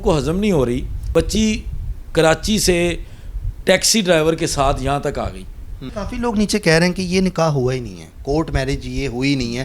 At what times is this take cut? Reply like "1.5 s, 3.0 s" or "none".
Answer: 1.0 s, 5.9 s